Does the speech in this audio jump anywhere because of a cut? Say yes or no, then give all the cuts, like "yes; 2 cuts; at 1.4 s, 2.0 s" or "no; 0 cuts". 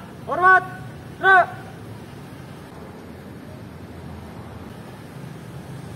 no; 0 cuts